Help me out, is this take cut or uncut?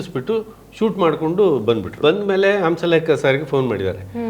cut